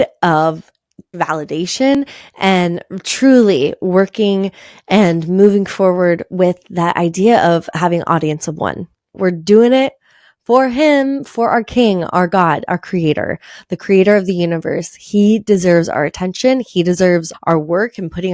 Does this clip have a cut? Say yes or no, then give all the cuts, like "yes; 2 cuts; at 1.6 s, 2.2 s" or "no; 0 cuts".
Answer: yes; 1 cut; at 1.1 s